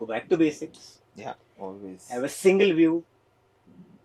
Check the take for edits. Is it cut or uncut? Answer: uncut